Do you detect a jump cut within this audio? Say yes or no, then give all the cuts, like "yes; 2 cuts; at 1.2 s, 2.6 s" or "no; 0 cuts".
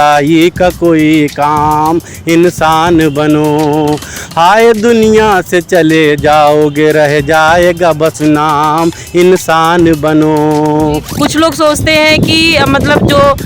yes; 1 cut; at 11.1 s